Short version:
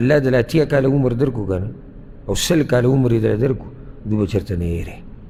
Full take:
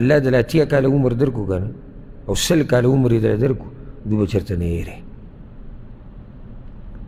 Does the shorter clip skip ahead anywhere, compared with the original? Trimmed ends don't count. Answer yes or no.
no